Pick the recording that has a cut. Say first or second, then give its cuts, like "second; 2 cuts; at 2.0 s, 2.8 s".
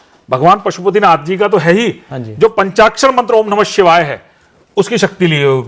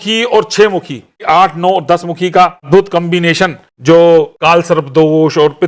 second; 4 cuts; at 1.2 s, 2.7 s, 3.7 s, 4.3 s